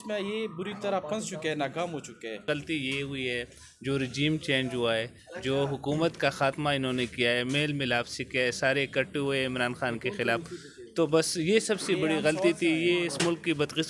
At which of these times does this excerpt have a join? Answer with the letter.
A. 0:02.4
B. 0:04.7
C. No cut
A